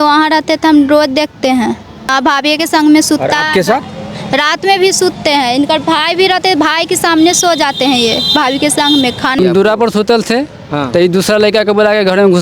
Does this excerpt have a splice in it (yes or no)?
yes